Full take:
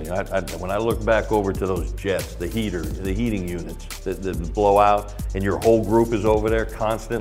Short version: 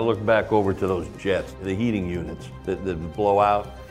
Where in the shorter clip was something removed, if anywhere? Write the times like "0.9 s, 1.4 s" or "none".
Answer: 1.5 s